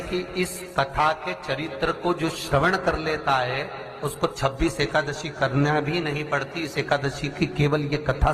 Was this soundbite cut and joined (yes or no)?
no